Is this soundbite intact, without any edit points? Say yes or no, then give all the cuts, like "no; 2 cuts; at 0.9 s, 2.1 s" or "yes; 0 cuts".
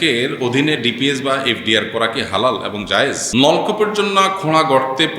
no; 1 cut; at 3.2 s